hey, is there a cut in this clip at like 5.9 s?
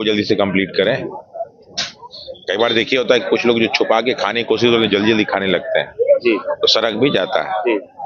no; 0 cuts

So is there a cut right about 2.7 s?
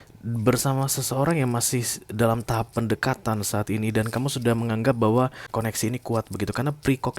no; 1 cut; at 5.4 s

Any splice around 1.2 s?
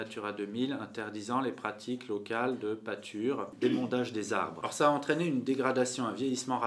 no; 2 cuts; at 3.5 s, 4.6 s

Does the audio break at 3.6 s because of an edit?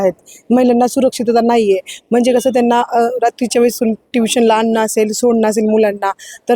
no; 0 cuts

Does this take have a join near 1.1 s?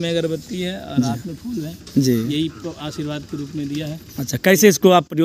no; 0 cuts

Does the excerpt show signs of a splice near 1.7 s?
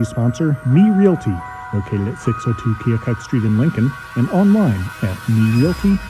no; 0 cuts

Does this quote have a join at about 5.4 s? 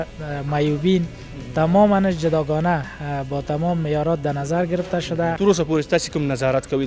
yes; 1 cut; at 5.4 s

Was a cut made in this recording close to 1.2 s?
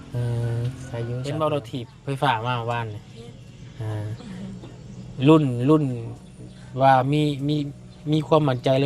yes; 1 cut; at 1.2 s

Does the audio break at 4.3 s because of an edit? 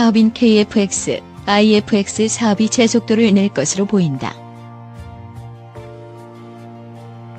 no; 0 cuts

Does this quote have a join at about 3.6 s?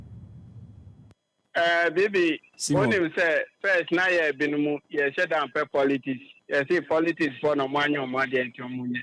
no; 1 cut; at 1.2 s

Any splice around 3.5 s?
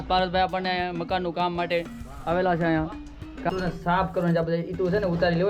yes; 1 cut; at 3.5 s

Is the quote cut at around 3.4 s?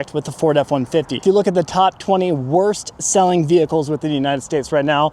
no; 1 cut; at 1.2 s

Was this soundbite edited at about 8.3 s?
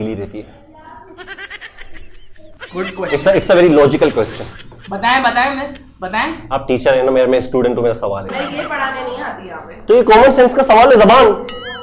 yes; 2 cuts; at 2.5 s, 8.3 s

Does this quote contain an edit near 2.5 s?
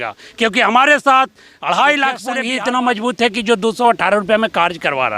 yes; 1 cut; at 2.5 s

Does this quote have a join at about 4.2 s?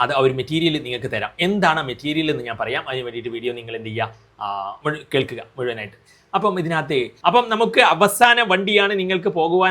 no; 1 cut; at 7.1 s

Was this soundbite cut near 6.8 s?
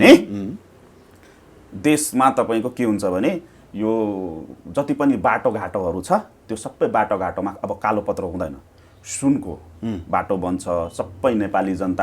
no; 0 cuts

